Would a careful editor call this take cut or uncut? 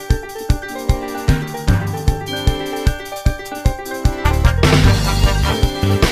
uncut